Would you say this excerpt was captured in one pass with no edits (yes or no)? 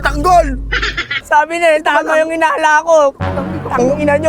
no